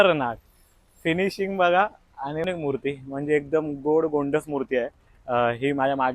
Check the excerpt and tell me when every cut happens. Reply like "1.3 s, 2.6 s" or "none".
2.4 s